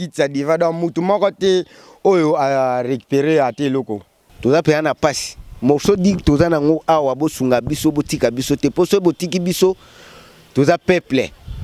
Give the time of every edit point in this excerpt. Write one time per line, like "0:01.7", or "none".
0:04.2